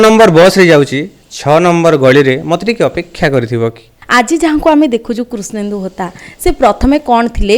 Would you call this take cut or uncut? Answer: cut